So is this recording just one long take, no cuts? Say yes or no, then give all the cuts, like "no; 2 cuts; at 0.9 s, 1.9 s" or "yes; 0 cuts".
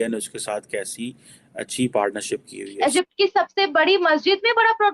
no; 1 cut; at 2.7 s